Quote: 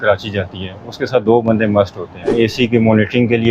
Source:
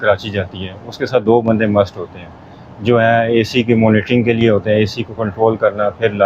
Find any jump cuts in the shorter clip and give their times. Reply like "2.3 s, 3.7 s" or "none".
2.3 s